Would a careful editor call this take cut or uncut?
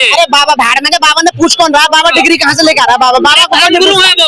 uncut